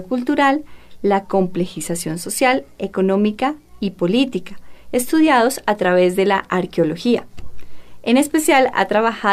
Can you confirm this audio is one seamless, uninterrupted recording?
no; 1 cut; at 8.2 s

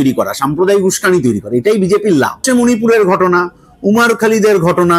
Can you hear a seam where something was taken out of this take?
yes; 1 cut; at 2.4 s

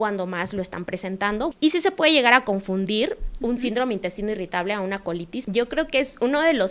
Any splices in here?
yes; 2 cuts; at 1.5 s, 5.4 s

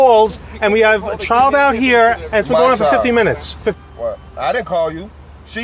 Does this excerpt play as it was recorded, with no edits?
no; 1 cut; at 3.8 s

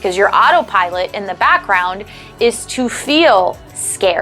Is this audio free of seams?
yes; 0 cuts

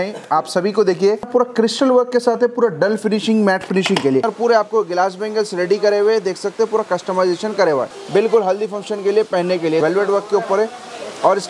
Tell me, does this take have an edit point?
yes; 4 cuts; at 1.3 s, 4.2 s, 8.0 s, 9.8 s

